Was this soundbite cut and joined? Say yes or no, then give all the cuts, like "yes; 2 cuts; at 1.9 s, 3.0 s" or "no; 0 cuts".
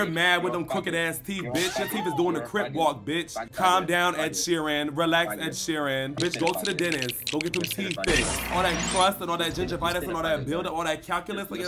no; 0 cuts